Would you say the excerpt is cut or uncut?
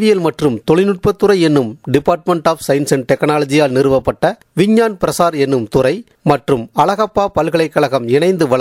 uncut